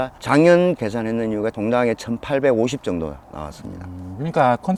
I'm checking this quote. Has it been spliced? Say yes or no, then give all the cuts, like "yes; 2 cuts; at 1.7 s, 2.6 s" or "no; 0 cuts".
no; 0 cuts